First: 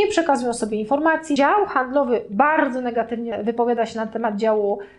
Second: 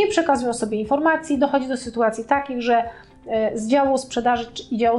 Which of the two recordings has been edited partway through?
first; 2 cuts; at 1.4 s, 3.3 s

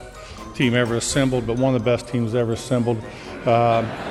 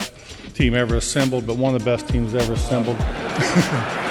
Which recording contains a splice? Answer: second; 1 cut; at 3.1 s

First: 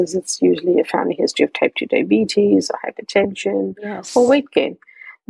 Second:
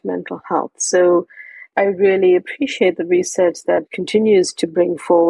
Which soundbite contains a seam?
second; 2 cuts; at 1.7 s, 3.9 s

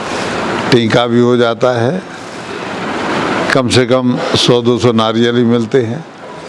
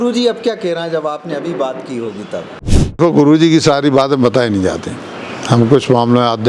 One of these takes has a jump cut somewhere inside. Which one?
second; 1 cut; at 3.0 s

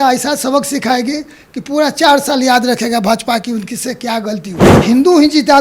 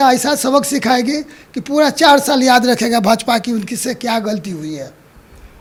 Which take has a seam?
first; 1 cut; at 4.7 s

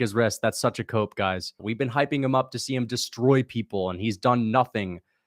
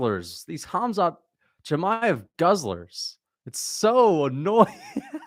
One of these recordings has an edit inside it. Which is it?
first; 1 cut; at 1.6 s

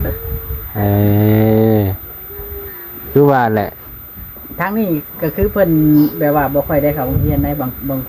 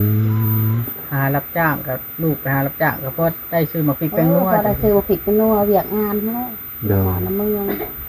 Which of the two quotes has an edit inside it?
second; 1 cut; at 0.9 s

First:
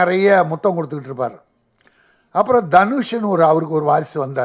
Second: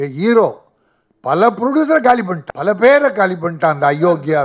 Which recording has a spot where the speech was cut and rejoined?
second; 1 cut; at 2.4 s

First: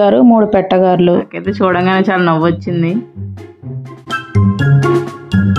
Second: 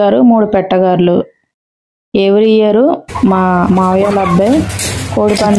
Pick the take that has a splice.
first; 1 cut; at 1.4 s

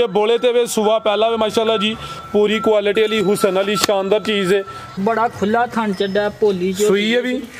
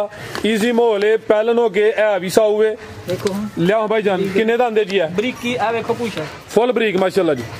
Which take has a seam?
first; 1 cut; at 4.9 s

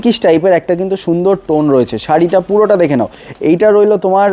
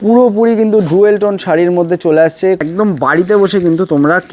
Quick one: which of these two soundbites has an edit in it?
second; 1 cut; at 2.6 s

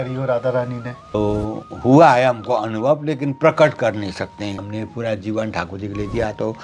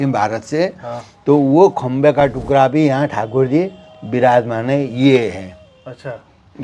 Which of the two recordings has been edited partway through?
first; 2 cuts; at 1.0 s, 4.6 s

